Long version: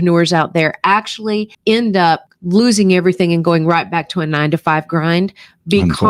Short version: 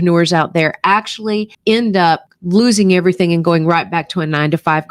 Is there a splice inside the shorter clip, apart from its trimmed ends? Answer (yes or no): no